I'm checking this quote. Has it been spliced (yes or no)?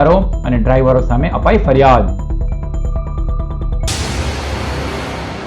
yes